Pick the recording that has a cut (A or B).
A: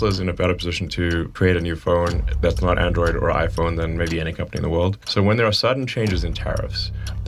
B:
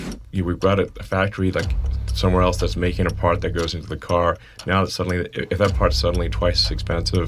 A